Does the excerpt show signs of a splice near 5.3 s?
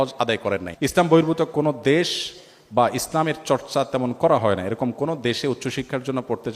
no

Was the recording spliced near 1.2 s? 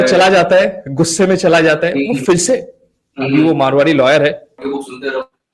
no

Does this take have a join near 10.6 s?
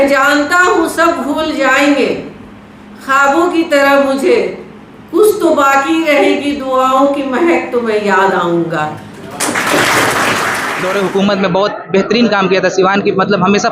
yes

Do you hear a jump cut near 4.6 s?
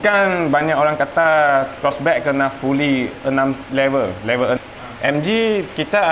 yes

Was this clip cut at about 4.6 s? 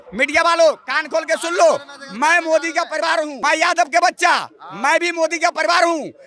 no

